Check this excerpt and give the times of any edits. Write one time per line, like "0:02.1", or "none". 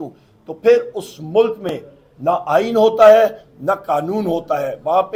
none